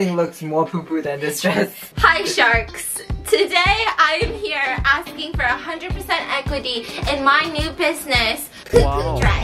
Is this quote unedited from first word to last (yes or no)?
yes